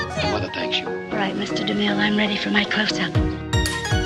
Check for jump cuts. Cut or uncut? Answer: uncut